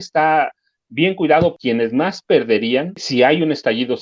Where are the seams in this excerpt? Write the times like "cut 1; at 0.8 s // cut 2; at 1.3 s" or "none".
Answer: cut 1; at 1.5 s // cut 2; at 3.0 s

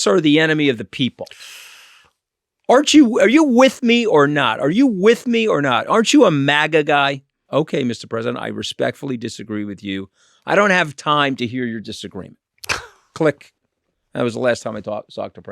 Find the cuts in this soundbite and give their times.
cut 1; at 7.3 s

